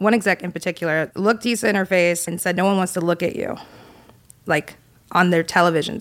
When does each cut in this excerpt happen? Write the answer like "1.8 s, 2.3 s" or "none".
1.1 s, 2.3 s